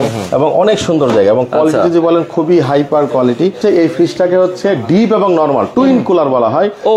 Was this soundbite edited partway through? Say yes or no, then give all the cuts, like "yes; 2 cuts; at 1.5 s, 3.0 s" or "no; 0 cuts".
yes; 2 cuts; at 3.6 s, 5.7 s